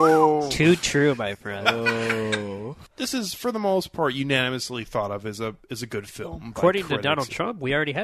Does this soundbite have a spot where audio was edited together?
yes; 1 cut; at 2.7 s

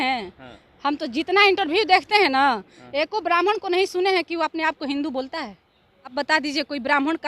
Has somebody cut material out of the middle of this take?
yes; 1 cut; at 6.1 s

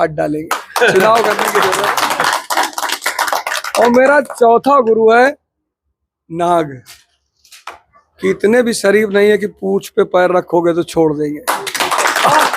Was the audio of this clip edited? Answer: no; 0 cuts

